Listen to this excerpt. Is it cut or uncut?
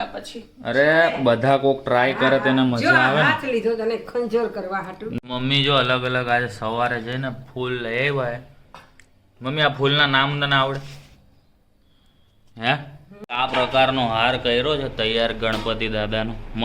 cut